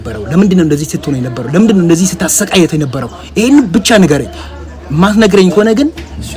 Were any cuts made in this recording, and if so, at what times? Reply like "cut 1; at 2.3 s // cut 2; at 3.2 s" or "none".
none